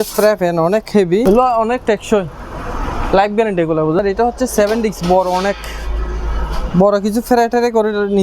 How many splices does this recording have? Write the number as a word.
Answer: two